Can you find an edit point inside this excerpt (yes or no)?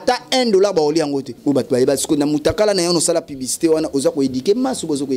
yes